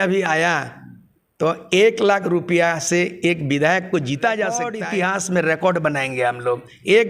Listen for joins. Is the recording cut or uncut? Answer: cut